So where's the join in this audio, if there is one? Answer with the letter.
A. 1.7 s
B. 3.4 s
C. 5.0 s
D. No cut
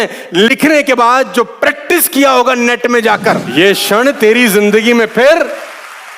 B